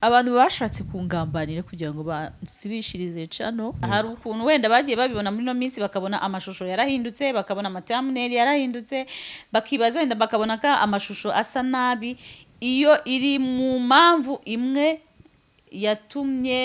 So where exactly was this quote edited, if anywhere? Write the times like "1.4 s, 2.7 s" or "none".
3.8 s